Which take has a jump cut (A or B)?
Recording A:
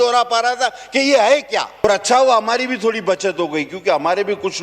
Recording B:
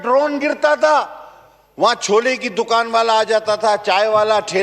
A